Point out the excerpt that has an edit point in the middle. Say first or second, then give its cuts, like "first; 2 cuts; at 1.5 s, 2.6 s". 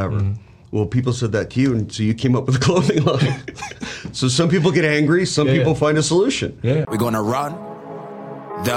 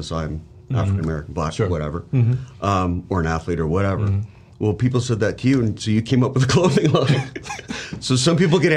first; 1 cut; at 6.9 s